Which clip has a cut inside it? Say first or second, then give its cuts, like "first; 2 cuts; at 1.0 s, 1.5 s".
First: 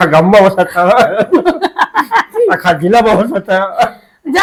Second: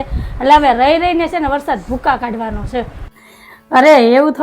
second; 1 cut; at 3.0 s